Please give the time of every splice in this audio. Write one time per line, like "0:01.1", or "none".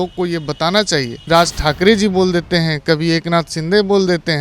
0:01.3